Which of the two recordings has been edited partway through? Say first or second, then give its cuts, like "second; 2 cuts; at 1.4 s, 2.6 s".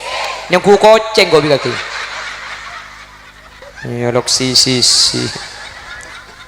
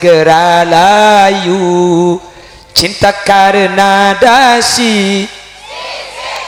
first; 1 cut; at 3.6 s